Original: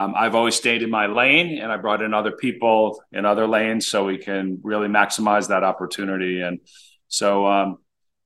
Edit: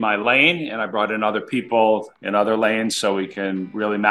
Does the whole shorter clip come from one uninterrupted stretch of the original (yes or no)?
yes